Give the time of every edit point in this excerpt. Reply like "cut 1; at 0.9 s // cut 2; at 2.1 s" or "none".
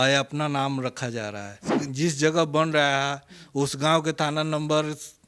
cut 1; at 1.7 s